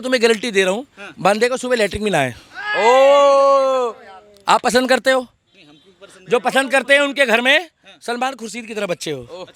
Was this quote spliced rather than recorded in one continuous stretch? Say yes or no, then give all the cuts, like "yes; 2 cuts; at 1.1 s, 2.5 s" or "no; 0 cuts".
no; 0 cuts